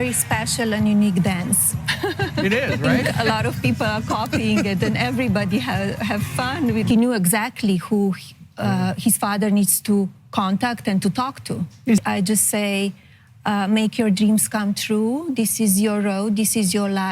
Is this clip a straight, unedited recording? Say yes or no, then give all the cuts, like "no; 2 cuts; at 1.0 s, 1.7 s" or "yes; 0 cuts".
no; 3 cuts; at 2.9 s, 6.9 s, 12.0 s